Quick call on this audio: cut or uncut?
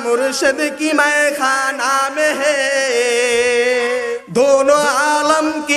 cut